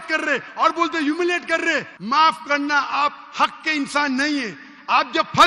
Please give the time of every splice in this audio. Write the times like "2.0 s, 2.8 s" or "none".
1.9 s